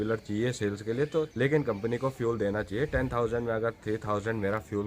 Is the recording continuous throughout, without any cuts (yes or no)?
no